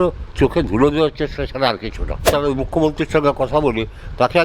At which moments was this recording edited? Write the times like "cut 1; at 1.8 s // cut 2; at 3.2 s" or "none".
cut 1; at 2.2 s